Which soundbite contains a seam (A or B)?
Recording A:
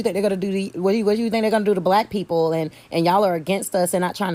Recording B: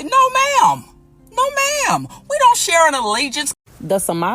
B